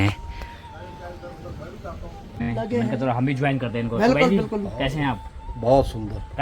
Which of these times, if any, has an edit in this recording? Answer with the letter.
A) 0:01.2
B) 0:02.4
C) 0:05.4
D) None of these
B